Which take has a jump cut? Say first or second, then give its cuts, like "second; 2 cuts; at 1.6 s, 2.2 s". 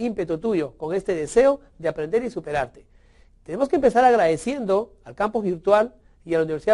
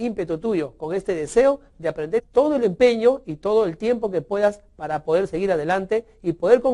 first; 1 cut; at 2.3 s